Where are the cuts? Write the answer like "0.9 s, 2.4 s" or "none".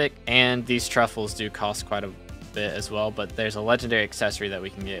none